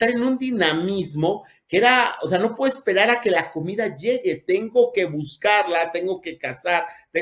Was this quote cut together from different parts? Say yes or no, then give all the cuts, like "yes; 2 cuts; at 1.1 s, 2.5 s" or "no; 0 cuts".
no; 0 cuts